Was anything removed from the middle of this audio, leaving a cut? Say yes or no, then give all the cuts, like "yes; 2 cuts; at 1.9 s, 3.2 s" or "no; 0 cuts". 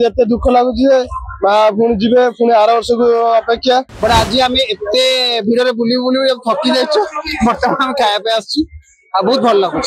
yes; 1 cut; at 3.9 s